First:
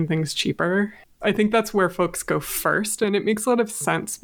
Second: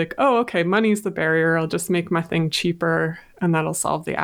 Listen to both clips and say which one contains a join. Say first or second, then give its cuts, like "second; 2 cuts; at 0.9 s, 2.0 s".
first; 2 cuts; at 1.1 s, 3.0 s